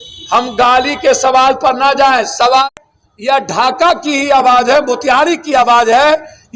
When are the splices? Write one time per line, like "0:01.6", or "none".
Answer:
0:02.6